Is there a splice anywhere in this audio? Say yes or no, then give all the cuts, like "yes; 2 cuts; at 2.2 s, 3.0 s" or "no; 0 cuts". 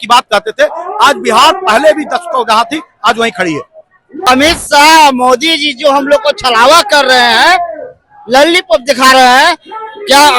yes; 1 cut; at 4.2 s